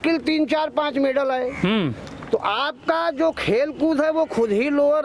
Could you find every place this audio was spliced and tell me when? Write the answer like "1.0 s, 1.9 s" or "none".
none